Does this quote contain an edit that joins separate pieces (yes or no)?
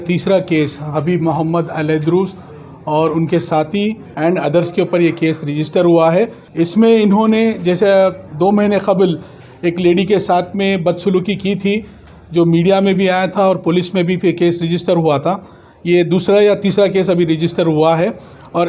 yes